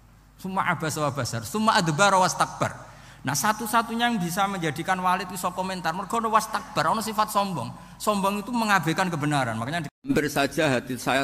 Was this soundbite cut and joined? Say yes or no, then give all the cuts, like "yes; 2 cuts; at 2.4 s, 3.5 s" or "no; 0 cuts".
yes; 1 cut; at 10.1 s